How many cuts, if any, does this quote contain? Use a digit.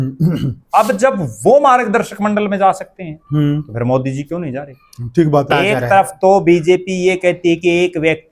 1